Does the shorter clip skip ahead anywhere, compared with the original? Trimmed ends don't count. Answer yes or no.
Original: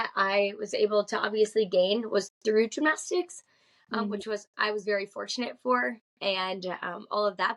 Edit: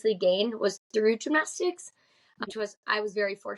yes